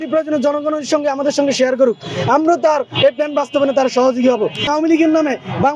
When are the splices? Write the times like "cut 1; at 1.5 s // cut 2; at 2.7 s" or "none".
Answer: cut 1; at 4.7 s

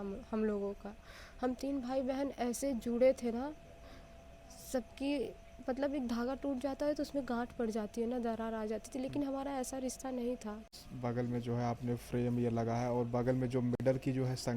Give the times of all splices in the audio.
cut 1; at 10.7 s

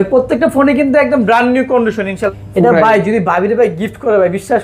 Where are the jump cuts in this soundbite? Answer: cut 1; at 2.2 s

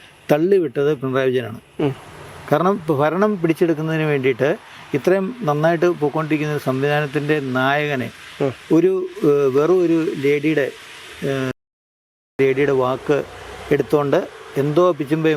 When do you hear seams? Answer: none

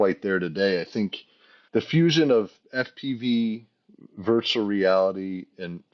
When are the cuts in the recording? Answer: cut 1; at 1.5 s

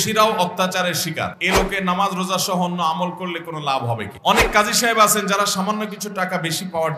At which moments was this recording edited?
cut 1; at 1.4 s // cut 2; at 4.1 s

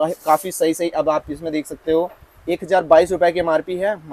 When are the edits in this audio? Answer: none

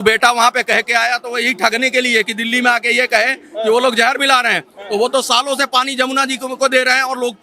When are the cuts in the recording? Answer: none

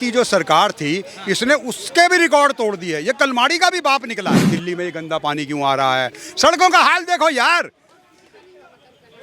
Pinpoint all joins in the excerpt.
cut 1; at 4.5 s

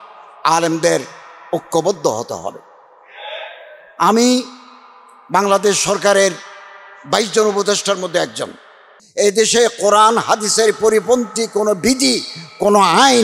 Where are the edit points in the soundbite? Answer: cut 1; at 9.0 s

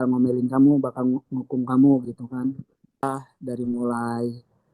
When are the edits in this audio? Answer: cut 1; at 3.0 s

